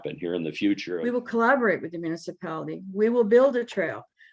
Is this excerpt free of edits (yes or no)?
no